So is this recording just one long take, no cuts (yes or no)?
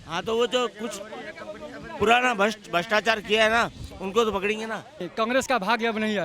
no